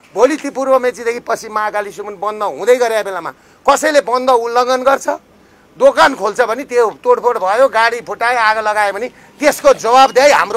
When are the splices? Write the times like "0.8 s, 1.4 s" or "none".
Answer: none